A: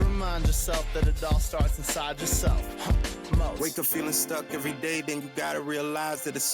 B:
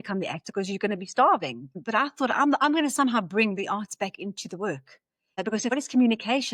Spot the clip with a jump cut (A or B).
B